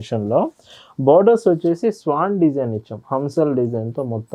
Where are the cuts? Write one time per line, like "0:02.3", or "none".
none